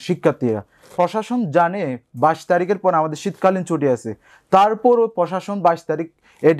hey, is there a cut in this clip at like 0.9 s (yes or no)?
yes